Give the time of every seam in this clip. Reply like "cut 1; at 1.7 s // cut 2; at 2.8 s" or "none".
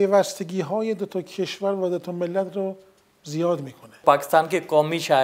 cut 1; at 4.0 s